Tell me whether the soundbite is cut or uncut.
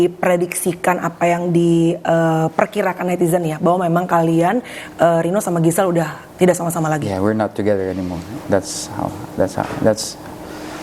uncut